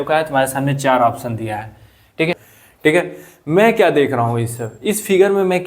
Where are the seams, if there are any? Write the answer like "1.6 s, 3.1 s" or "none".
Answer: 2.4 s